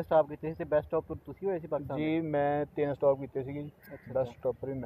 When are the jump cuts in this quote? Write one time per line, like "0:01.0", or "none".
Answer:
none